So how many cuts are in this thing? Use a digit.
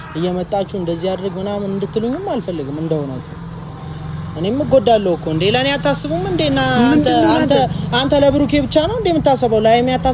0